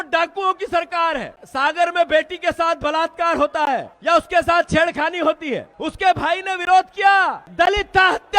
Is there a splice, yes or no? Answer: yes